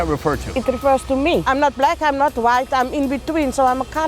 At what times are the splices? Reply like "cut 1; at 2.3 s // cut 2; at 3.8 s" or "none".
cut 1; at 1.4 s